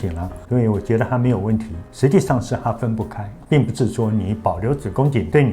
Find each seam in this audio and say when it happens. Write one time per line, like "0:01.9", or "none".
0:01.8